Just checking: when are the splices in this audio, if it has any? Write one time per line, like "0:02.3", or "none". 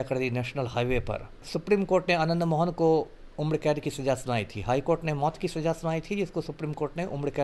0:01.5